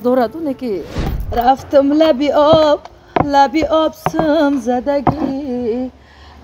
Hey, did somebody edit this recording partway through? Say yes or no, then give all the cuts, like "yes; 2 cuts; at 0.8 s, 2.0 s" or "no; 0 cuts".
yes; 1 cut; at 1.1 s